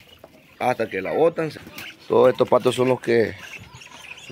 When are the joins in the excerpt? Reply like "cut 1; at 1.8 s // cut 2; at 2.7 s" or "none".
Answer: cut 1; at 1.6 s